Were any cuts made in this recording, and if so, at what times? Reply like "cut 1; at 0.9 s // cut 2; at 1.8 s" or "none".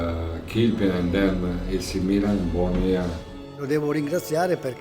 cut 1; at 3.6 s